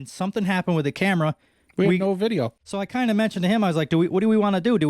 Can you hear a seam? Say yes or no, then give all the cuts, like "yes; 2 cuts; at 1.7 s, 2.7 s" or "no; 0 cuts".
yes; 1 cut; at 2.5 s